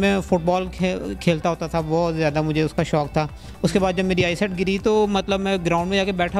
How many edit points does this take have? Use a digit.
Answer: 0